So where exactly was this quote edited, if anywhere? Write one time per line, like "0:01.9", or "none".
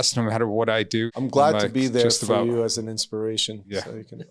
0:01.1